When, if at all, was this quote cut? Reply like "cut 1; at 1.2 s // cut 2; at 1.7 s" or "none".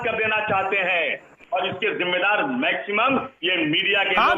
cut 1; at 1.3 s

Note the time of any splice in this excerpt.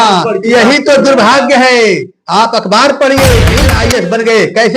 cut 1; at 3.7 s

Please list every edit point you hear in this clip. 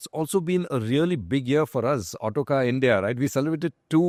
none

